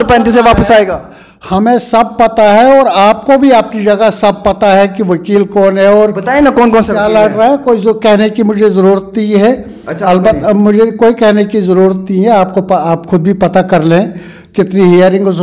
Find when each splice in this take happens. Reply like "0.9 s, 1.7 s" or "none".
none